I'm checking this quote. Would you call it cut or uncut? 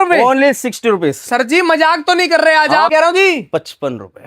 cut